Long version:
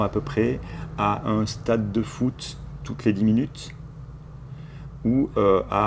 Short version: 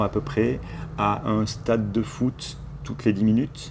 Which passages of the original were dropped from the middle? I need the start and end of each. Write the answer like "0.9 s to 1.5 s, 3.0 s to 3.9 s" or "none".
none